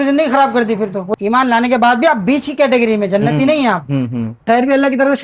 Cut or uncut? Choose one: cut